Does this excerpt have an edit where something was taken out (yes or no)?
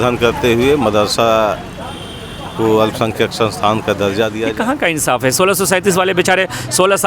yes